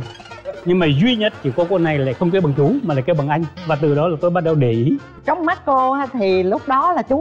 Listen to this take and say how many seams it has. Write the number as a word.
two